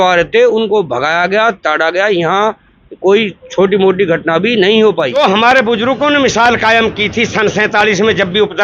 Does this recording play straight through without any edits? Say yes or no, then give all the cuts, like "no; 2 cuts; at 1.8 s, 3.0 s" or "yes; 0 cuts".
no; 1 cut; at 5.2 s